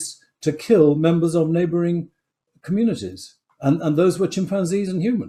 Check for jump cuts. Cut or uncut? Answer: uncut